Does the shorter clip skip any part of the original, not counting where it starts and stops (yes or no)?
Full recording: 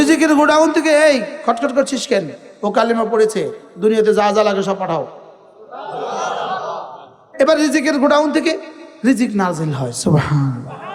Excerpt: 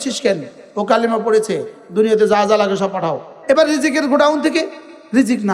yes